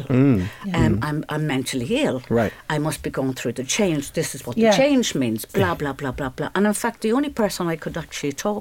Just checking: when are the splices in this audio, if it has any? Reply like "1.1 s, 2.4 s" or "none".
none